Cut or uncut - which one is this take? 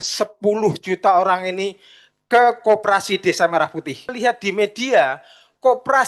cut